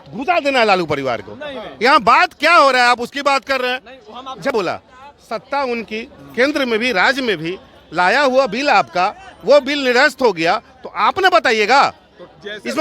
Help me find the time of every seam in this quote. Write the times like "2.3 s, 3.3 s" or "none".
4.5 s